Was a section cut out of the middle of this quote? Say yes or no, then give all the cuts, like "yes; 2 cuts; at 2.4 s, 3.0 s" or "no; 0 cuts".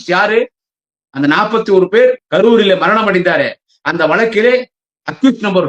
yes; 1 cut; at 2.2 s